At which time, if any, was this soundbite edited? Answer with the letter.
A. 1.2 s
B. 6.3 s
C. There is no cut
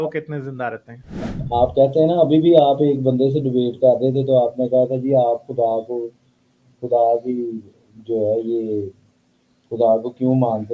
A